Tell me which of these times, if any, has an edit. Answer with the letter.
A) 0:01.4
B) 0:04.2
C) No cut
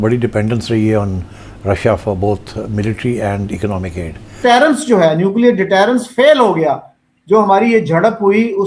B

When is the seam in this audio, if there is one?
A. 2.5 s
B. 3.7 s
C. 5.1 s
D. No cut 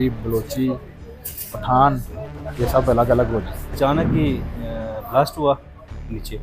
B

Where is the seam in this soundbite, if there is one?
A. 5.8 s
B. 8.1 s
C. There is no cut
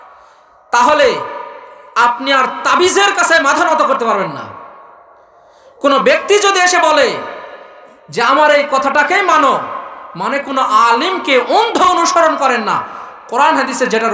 C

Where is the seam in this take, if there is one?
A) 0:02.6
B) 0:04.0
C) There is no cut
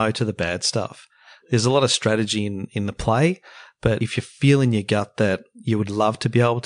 B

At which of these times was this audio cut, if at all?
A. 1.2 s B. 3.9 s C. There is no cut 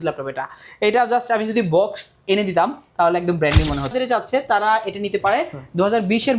B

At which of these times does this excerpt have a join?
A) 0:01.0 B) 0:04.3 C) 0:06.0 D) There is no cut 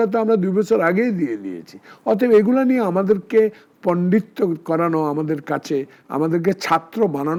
D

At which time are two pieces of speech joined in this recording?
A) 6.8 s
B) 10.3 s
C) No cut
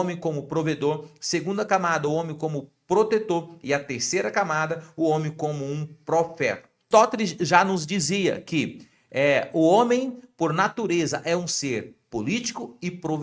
A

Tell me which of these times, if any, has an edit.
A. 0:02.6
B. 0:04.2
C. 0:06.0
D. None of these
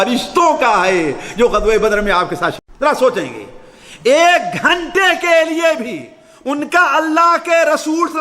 A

